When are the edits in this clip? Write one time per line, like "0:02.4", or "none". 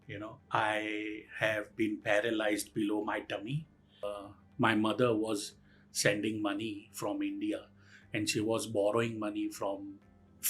0:04.0